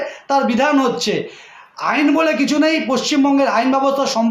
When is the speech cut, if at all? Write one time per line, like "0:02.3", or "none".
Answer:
none